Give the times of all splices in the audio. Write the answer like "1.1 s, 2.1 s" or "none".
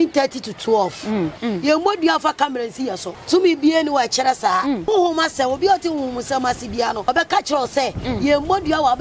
1.4 s, 3.1 s, 4.9 s, 7.1 s